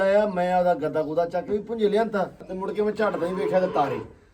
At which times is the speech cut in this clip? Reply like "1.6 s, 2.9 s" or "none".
2.5 s

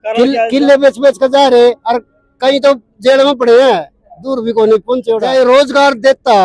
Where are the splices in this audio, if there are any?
5.2 s

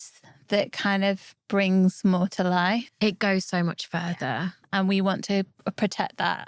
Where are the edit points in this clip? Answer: 4.5 s

